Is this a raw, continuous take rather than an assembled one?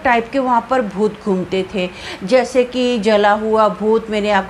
yes; 0 cuts

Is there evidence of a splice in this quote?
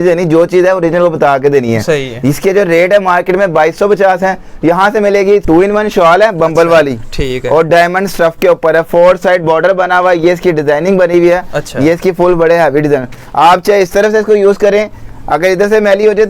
yes; 1 cut; at 5.4 s

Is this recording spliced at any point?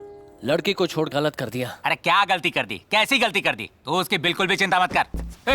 yes; 1 cut; at 1.1 s

